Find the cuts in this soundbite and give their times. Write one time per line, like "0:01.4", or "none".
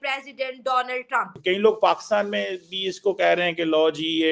0:01.3